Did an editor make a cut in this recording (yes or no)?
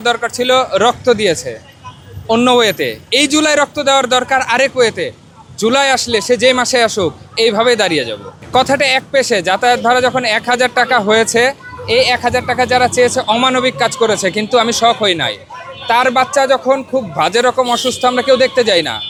no